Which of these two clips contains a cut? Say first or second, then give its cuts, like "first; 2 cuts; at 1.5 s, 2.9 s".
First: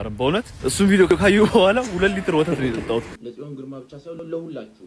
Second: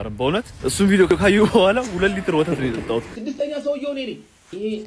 first; 1 cut; at 3.1 s